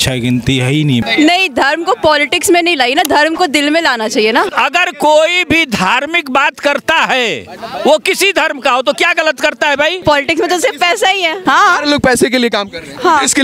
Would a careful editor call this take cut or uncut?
cut